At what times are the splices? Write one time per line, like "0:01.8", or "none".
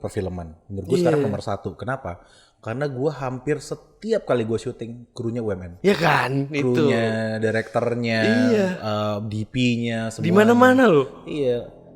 none

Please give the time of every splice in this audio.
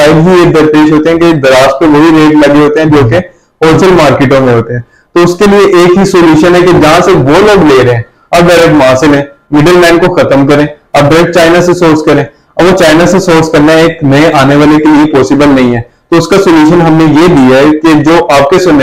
none

